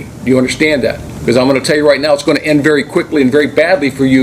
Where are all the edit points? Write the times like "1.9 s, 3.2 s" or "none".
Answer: 1.1 s